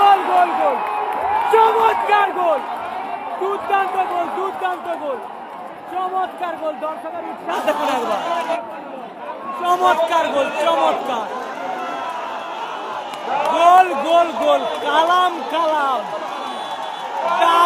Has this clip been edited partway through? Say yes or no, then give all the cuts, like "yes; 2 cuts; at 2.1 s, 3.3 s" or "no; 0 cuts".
no; 0 cuts